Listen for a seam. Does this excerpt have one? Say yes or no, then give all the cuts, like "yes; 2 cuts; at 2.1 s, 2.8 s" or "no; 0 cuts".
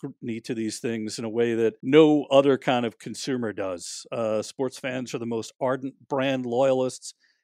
yes; 1 cut; at 1.8 s